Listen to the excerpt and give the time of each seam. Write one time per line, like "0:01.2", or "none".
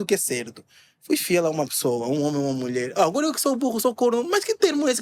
none